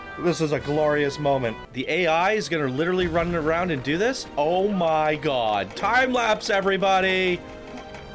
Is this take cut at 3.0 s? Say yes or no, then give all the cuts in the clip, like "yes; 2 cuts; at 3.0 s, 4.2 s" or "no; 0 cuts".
no; 1 cut; at 1.7 s